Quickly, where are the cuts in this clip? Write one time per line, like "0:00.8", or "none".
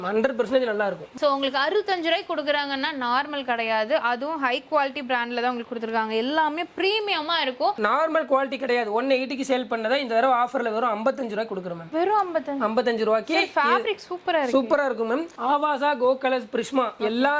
0:01.2
0:07.8
0:15.3